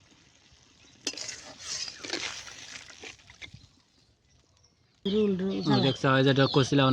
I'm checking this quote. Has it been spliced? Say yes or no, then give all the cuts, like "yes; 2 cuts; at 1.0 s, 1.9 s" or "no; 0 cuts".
yes; 1 cut; at 5.0 s